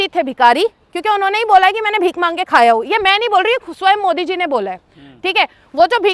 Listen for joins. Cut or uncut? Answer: uncut